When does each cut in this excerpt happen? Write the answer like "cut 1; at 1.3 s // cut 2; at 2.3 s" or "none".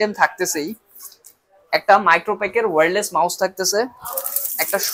none